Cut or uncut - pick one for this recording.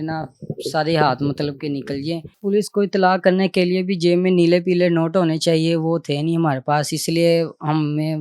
cut